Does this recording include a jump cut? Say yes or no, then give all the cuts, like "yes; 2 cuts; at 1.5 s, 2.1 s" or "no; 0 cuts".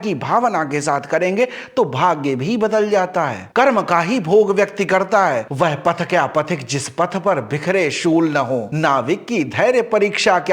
yes; 1 cut; at 5.4 s